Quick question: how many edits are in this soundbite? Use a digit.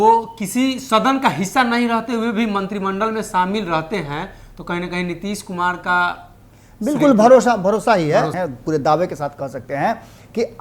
1